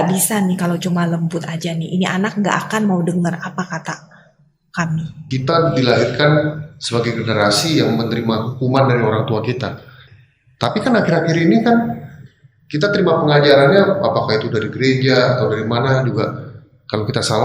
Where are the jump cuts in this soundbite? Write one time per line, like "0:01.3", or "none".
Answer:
0:05.2
0:10.1